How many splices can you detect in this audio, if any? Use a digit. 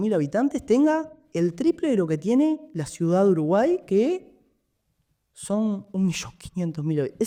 0